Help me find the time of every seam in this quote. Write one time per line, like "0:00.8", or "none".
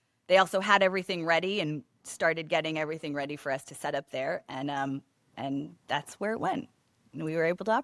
none